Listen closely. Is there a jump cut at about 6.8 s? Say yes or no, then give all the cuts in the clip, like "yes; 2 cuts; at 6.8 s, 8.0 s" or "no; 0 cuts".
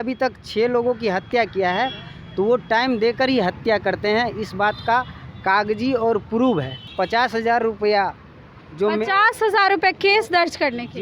yes; 1 cut; at 6.8 s